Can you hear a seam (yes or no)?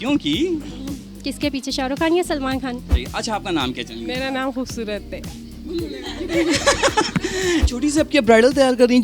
yes